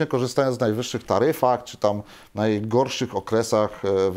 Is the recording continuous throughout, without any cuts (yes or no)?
yes